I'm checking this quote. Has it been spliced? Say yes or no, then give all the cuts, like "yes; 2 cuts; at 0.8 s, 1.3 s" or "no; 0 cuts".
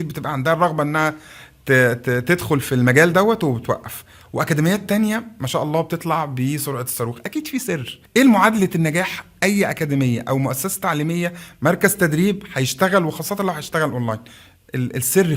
yes; 1 cut; at 7.9 s